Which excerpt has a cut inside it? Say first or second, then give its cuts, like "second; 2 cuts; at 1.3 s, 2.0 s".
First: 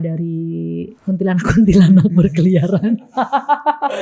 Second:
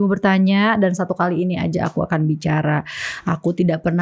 first; 1 cut; at 1.0 s